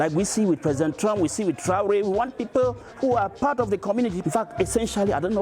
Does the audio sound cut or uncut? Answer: cut